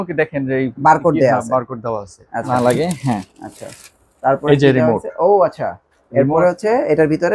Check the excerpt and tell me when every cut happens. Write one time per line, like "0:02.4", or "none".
0:02.5